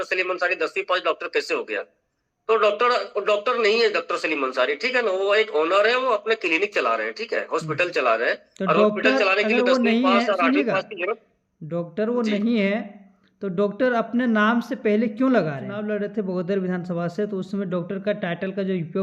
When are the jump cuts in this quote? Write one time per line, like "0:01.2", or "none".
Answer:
0:15.7